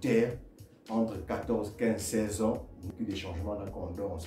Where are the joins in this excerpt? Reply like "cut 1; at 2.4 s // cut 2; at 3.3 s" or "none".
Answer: cut 1; at 2.8 s